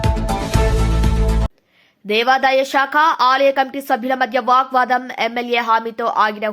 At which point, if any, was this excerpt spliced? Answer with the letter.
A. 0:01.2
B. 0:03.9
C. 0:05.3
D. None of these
A